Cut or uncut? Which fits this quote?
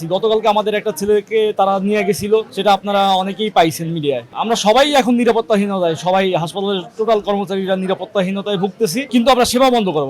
cut